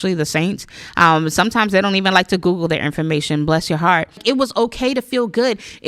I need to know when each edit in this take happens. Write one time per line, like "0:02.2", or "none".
0:04.2